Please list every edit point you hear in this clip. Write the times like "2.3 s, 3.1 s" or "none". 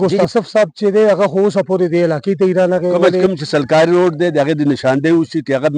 3.2 s